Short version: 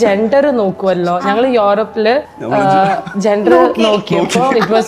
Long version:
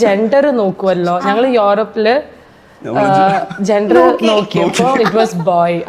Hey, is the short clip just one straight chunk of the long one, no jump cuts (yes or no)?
no